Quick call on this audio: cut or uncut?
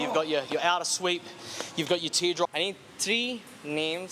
cut